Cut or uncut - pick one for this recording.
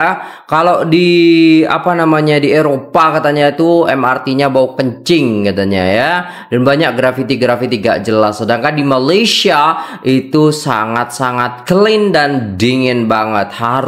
uncut